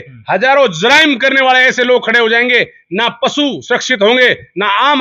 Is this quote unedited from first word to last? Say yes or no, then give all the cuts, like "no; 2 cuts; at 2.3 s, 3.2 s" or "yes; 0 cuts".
yes; 0 cuts